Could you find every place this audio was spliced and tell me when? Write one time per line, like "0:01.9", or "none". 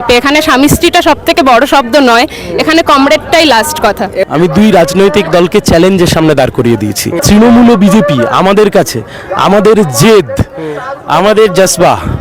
0:04.2
0:07.2